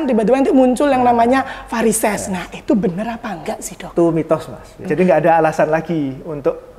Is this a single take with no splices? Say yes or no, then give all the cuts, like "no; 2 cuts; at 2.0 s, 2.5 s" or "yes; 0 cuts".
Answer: no; 1 cut; at 4.8 s